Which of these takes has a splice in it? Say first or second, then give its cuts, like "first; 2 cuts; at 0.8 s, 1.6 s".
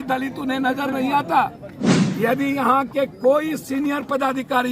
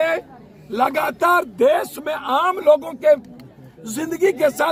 first; 1 cut; at 1.9 s